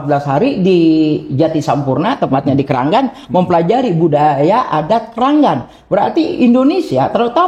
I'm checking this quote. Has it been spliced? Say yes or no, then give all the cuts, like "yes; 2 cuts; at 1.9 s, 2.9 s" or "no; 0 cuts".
no; 0 cuts